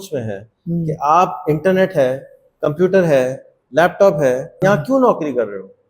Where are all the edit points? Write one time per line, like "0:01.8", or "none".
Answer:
0:04.5